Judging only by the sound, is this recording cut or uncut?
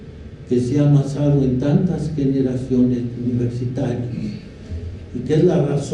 cut